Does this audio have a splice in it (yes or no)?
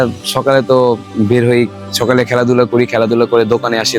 no